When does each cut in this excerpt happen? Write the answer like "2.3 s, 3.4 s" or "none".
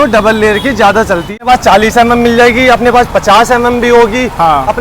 1.4 s